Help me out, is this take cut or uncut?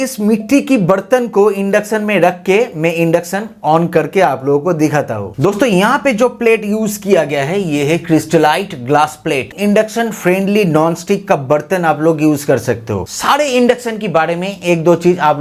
cut